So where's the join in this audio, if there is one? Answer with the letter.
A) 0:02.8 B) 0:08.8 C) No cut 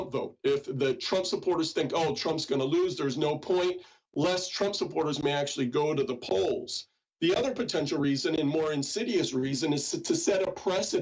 B